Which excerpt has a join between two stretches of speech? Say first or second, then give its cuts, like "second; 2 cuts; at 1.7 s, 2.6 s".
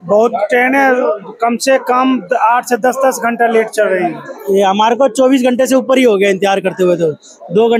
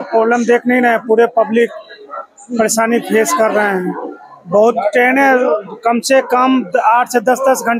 first; 1 cut; at 4.3 s